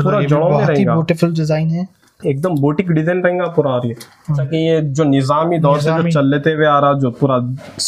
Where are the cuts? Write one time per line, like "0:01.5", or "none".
0:04.5